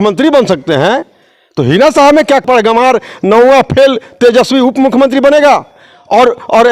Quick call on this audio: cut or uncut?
cut